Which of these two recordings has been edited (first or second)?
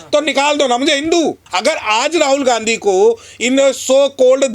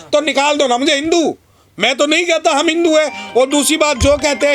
first